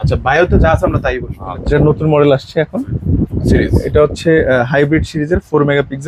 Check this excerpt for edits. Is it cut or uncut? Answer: cut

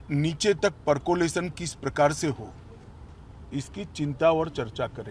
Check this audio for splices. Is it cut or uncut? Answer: uncut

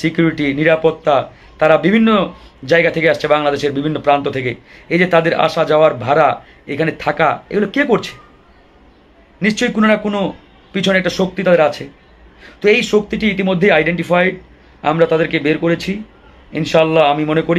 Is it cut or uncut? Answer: uncut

